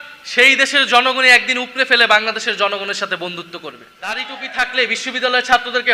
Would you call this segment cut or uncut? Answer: cut